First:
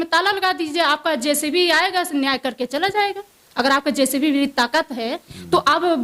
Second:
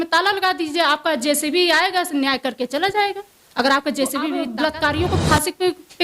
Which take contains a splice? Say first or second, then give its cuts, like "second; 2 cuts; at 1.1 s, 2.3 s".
second; 1 cut; at 4.4 s